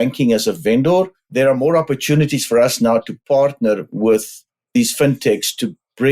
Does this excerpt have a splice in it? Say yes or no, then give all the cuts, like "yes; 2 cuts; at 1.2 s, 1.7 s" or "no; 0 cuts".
yes; 1 cut; at 1.2 s